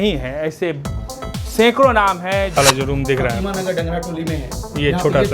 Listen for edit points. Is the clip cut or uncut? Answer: cut